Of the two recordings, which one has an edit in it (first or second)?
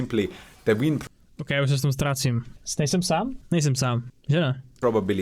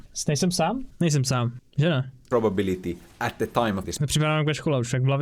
second